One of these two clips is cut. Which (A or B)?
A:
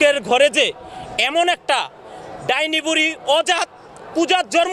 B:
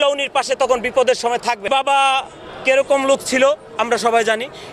B